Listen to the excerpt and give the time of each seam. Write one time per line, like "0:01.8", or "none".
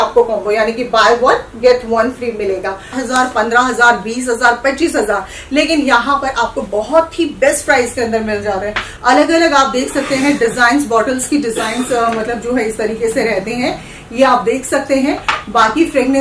0:03.0
0:08.9